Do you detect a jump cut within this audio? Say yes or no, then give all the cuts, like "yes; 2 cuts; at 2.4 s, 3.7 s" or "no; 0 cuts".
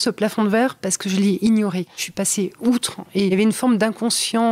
yes; 2 cuts; at 2.0 s, 3.0 s